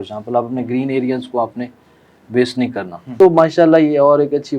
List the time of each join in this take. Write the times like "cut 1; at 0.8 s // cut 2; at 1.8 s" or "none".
cut 1; at 3.1 s